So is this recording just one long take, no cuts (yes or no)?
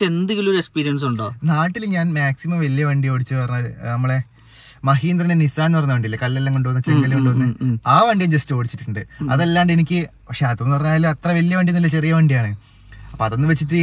yes